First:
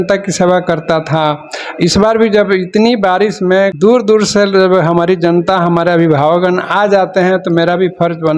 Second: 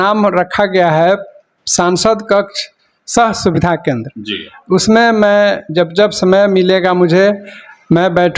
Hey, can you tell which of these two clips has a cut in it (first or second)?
first